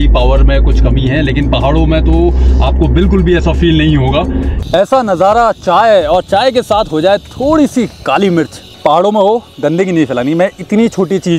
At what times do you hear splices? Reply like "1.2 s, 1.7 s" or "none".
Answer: 4.5 s, 8.6 s